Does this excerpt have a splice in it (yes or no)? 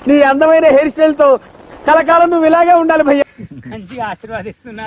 yes